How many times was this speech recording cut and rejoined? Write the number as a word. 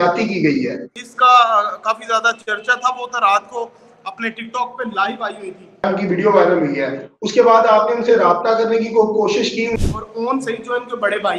three